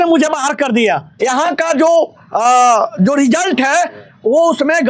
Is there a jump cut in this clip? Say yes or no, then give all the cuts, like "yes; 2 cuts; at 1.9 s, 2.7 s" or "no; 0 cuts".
yes; 1 cut; at 1.1 s